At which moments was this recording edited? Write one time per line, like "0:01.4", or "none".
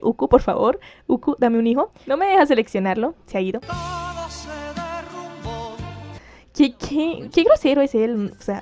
none